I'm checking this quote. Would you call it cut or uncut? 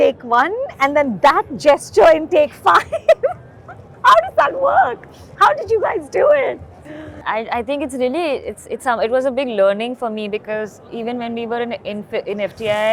uncut